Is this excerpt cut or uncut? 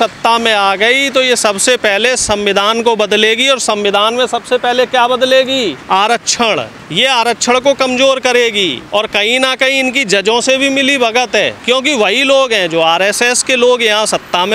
cut